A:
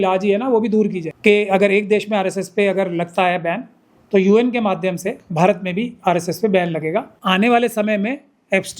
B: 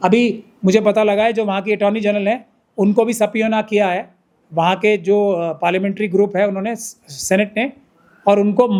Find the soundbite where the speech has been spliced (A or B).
A